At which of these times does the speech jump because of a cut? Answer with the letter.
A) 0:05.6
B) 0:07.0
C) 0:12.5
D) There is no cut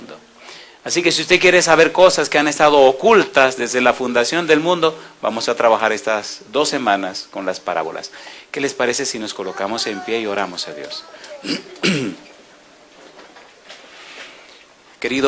A